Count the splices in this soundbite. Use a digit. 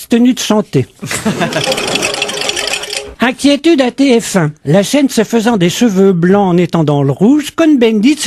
1